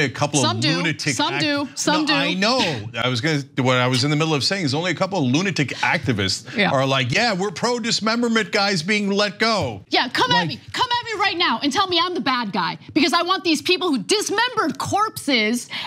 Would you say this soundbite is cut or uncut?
cut